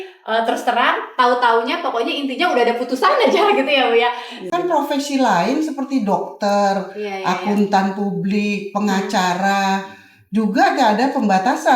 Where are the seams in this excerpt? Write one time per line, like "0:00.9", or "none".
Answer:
0:04.5

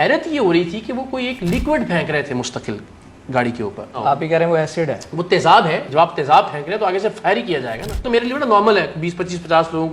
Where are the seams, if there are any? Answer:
0:04.0
0:05.9
0:08.0

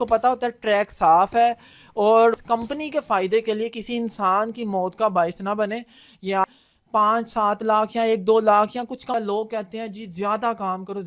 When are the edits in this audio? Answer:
0:02.4
0:06.4
0:09.1

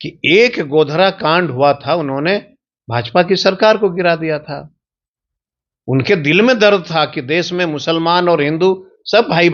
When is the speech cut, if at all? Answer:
none

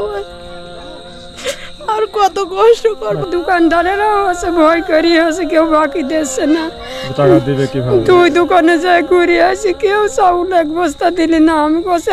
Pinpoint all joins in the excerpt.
0:03.2

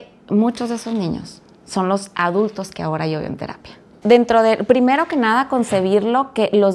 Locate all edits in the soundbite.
0:03.9

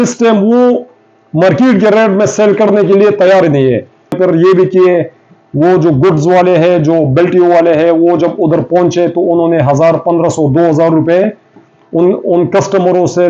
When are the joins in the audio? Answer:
0:04.1

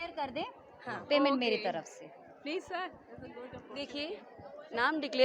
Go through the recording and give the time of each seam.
none

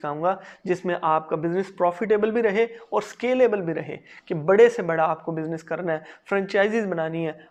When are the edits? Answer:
none

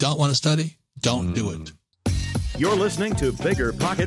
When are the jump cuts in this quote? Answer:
0:01.9

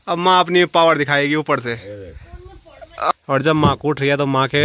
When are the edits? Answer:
0:03.1

